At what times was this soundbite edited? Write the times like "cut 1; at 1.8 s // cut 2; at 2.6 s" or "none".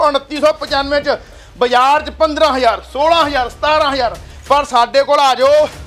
cut 1; at 1.4 s

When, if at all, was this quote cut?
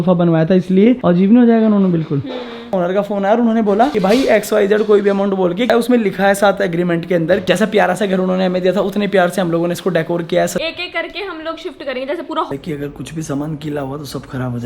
cut 1; at 1.0 s // cut 2; at 2.7 s // cut 3; at 5.7 s // cut 4; at 7.4 s // cut 5; at 10.6 s // cut 6; at 12.5 s

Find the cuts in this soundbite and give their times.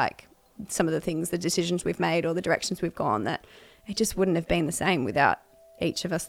none

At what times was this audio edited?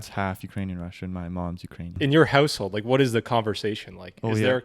cut 1; at 2.0 s

